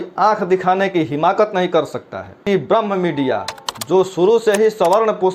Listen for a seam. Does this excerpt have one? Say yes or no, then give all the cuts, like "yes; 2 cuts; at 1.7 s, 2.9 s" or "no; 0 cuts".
yes; 1 cut; at 2.3 s